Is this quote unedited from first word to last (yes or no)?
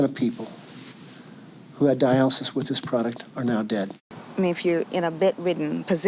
no